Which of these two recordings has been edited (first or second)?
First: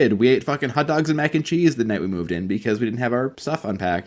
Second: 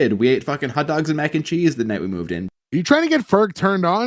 second